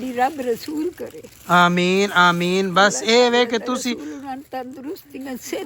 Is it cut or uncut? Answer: uncut